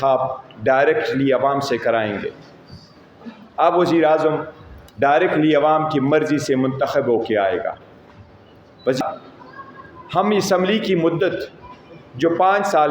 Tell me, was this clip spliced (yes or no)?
yes